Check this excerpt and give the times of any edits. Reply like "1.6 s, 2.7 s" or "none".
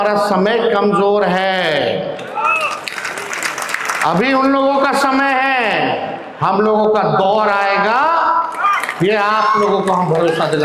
none